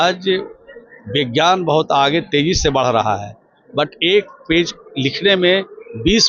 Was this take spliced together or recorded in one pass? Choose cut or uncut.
uncut